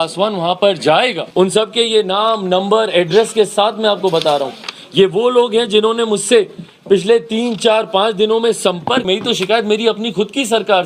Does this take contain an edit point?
yes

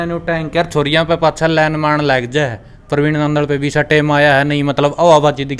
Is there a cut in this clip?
no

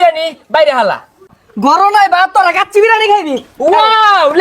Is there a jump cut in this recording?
yes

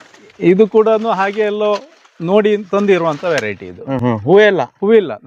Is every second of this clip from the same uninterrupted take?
yes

